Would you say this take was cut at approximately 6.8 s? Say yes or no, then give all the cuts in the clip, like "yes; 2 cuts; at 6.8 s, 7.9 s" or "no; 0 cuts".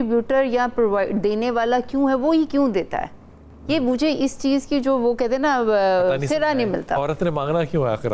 no; 0 cuts